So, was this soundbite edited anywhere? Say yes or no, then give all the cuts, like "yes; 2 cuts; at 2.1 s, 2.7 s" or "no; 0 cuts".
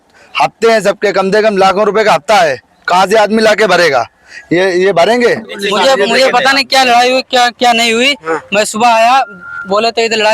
yes; 1 cut; at 5.6 s